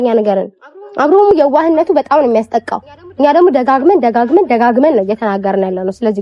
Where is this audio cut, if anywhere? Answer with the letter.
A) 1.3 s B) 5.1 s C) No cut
A